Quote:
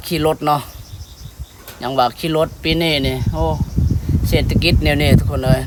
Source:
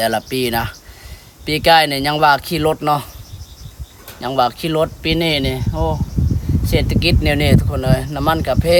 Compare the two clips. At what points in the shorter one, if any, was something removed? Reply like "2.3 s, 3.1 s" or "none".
none